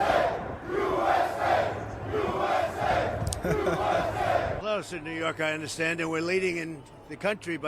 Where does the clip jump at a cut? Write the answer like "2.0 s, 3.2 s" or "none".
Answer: 4.6 s